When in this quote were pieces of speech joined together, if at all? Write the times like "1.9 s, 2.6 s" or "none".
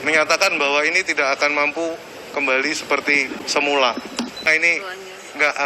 3.4 s, 4.5 s